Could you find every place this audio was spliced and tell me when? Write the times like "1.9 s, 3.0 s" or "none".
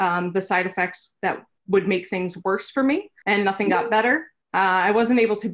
1.5 s, 3.1 s, 4.4 s

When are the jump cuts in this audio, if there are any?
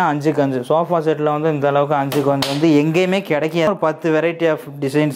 3.7 s

